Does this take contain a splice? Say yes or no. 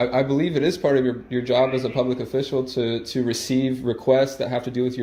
no